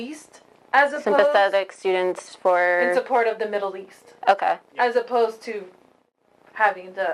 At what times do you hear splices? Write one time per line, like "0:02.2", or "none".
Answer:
none